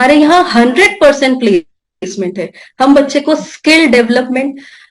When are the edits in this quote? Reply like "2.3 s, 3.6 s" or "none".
none